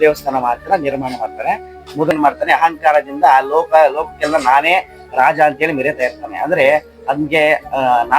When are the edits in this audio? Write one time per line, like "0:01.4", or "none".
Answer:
0:02.1